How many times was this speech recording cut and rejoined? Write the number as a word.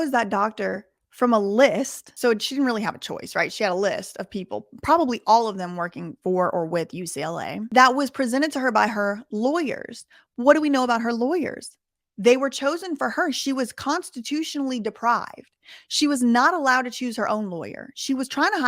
two